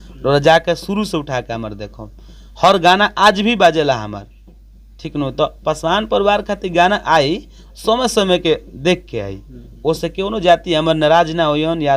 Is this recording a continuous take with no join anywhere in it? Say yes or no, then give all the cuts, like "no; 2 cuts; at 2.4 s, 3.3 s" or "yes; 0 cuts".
yes; 0 cuts